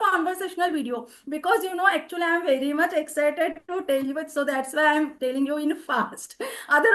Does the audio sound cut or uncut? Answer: uncut